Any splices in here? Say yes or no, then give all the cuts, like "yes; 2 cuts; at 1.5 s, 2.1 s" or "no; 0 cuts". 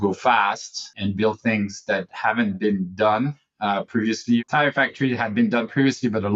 yes; 2 cuts; at 0.9 s, 4.4 s